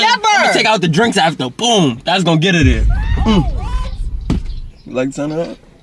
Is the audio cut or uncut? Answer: cut